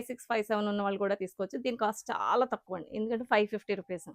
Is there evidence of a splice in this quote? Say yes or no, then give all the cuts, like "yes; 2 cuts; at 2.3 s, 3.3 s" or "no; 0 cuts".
no; 0 cuts